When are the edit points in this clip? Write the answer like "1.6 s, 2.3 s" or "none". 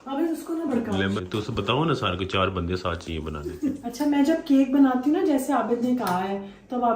1.2 s